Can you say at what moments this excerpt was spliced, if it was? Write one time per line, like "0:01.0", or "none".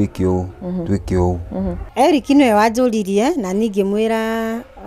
0:01.8